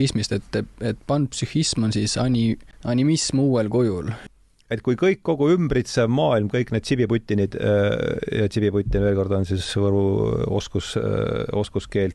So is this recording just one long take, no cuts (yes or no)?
no